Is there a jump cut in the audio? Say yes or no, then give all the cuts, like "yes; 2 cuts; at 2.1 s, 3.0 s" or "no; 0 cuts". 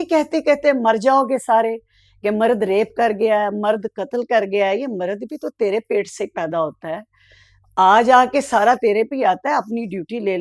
no; 0 cuts